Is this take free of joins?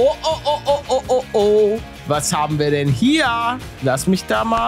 yes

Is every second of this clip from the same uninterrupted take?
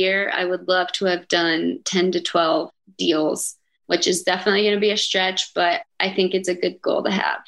no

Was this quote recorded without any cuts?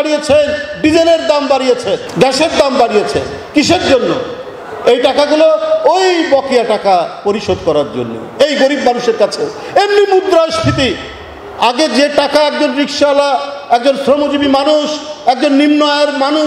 yes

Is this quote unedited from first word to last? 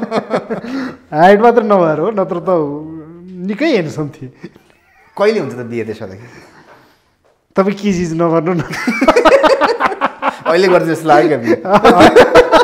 yes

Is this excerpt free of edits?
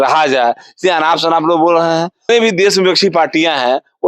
no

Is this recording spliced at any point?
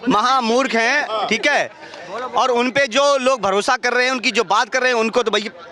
no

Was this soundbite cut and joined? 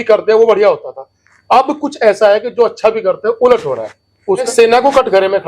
yes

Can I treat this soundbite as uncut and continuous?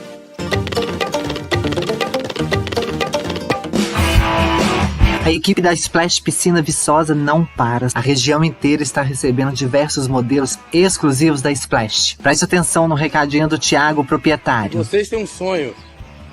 no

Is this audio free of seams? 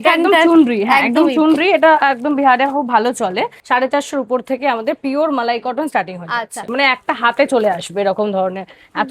no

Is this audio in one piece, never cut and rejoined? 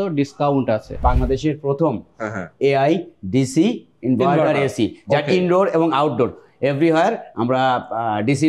no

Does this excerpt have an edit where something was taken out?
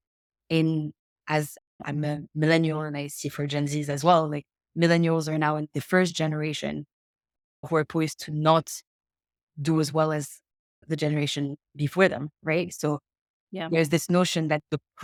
no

